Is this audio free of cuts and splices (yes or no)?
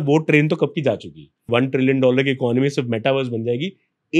no